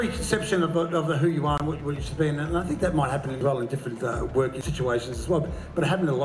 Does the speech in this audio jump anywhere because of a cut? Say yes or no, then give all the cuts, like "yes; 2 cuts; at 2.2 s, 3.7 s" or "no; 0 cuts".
yes; 2 cuts; at 3.4 s, 4.6 s